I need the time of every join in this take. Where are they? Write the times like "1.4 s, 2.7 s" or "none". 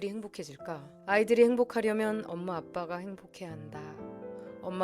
0.9 s